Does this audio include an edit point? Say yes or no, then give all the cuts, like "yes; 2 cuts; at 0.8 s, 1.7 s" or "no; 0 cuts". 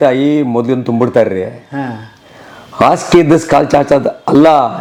no; 0 cuts